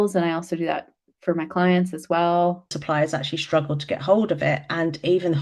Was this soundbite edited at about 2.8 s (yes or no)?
yes